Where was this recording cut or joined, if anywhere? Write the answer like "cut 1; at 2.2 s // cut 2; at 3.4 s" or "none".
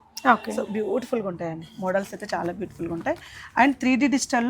none